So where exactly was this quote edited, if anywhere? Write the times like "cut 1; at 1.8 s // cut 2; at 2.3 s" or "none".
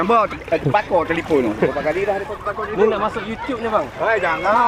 none